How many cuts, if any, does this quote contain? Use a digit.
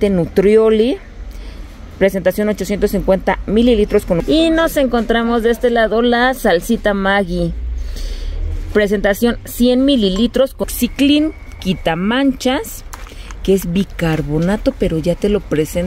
2